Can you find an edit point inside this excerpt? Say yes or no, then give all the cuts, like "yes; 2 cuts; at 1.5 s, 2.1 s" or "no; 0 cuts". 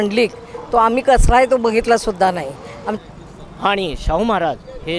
yes; 1 cut; at 3.0 s